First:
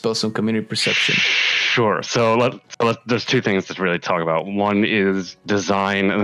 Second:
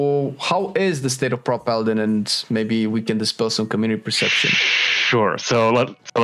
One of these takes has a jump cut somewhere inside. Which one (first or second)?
first